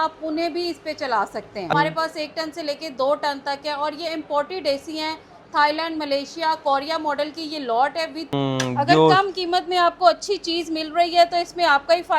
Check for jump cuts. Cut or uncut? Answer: cut